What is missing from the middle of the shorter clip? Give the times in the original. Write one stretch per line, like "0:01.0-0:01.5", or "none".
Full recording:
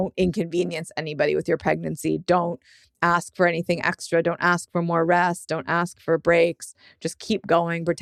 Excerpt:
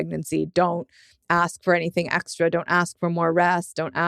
none